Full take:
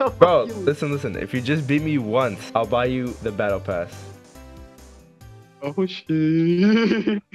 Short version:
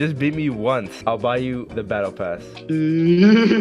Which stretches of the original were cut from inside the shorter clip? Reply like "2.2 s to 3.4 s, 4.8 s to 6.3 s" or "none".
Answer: 4.1 s to 6.0 s